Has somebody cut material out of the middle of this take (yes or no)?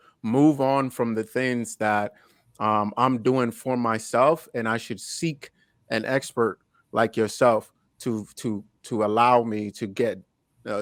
no